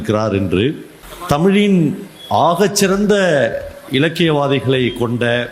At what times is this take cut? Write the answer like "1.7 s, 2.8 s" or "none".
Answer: 1.4 s